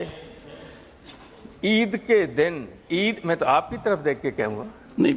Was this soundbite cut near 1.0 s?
no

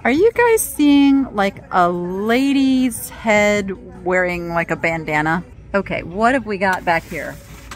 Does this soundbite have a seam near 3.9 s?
no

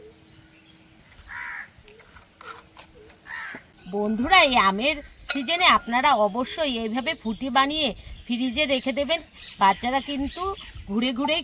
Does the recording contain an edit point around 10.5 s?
no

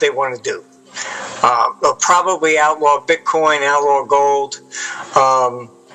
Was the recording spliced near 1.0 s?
no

